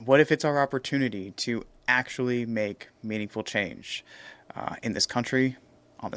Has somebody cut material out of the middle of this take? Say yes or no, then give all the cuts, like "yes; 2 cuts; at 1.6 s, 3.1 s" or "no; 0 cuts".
no; 0 cuts